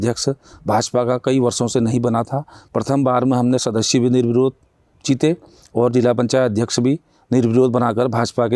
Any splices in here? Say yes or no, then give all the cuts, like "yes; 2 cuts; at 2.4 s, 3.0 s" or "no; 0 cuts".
no; 0 cuts